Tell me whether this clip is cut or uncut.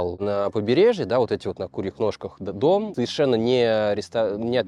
uncut